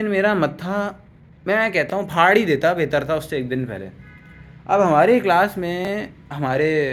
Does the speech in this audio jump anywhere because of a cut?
no; 0 cuts

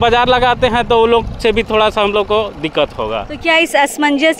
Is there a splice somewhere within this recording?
no; 0 cuts

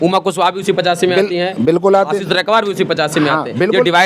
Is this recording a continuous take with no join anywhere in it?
yes; 0 cuts

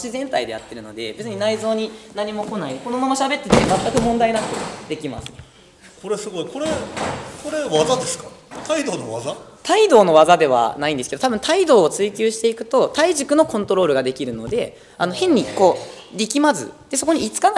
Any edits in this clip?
no; 0 cuts

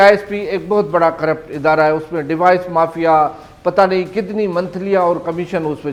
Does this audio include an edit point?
no; 0 cuts

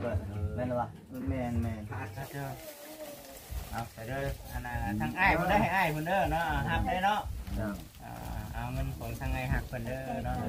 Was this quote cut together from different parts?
yes; 1 cut; at 2.2 s

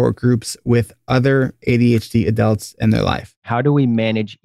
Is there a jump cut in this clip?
yes; 1 cut; at 3.4 s

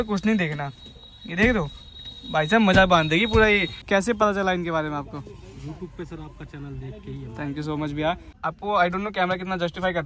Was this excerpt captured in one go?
no; 2 cuts; at 3.7 s, 8.3 s

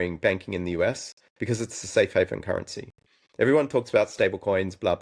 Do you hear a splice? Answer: no; 0 cuts

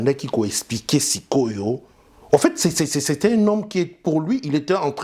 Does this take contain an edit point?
no; 0 cuts

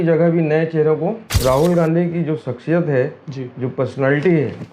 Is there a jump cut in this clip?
yes; 1 cut; at 1.4 s

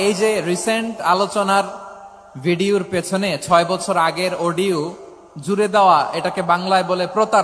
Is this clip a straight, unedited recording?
yes; 0 cuts

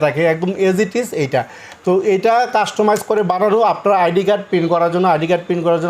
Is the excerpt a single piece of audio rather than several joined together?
yes; 0 cuts

